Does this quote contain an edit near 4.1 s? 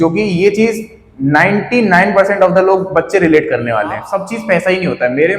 yes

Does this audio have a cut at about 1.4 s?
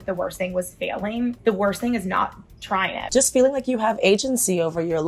yes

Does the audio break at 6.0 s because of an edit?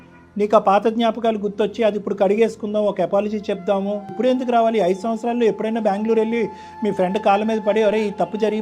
no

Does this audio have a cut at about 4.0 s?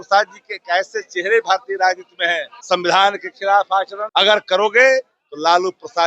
yes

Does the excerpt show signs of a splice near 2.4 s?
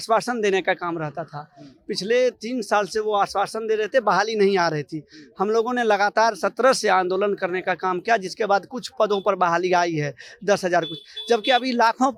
no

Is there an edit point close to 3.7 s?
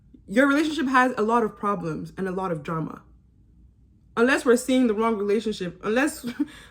no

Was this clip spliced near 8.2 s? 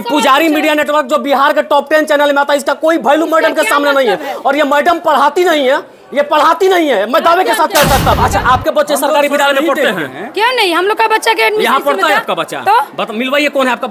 yes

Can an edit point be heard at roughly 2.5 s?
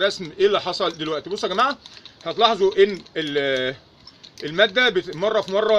no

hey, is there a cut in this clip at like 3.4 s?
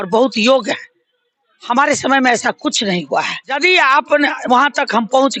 yes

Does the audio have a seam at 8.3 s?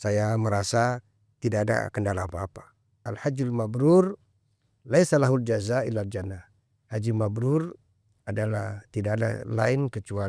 no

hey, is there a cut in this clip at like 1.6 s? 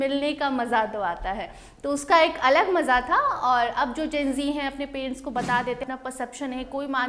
no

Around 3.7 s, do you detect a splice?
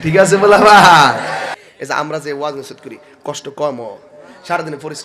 no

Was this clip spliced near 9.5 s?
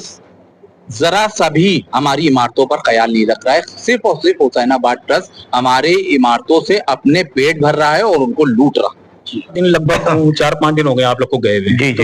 yes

